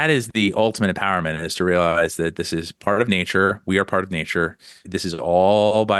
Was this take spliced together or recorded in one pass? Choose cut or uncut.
cut